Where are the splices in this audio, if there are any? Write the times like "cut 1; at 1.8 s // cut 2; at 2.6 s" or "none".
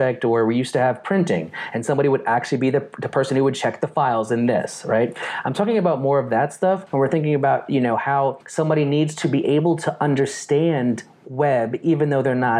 cut 1; at 6.9 s // cut 2; at 8.4 s